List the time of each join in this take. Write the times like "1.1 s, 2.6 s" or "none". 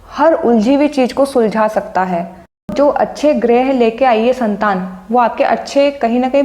2.7 s